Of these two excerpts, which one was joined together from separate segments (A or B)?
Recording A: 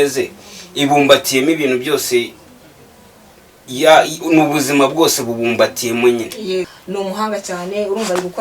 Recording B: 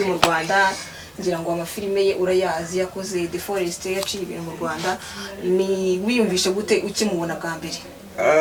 A